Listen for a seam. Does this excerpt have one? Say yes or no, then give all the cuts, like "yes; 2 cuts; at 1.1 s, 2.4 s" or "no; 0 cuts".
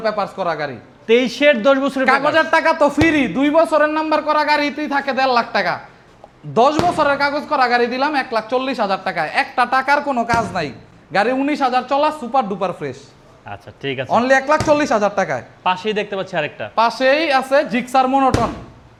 no; 0 cuts